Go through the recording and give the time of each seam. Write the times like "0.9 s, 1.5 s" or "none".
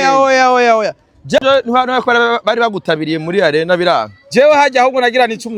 1.4 s